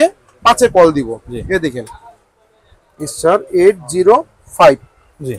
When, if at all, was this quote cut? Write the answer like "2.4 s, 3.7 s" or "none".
none